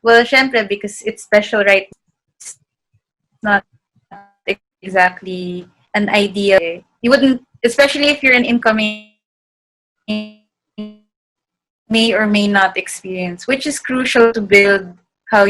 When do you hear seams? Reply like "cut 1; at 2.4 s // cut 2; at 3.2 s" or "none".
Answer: cut 1; at 1.9 s